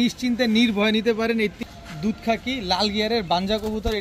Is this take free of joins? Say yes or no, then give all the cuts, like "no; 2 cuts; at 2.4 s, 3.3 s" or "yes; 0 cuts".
no; 1 cut; at 1.6 s